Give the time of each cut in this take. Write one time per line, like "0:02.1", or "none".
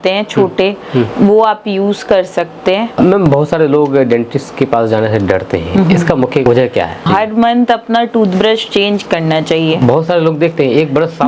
0:03.0
0:06.8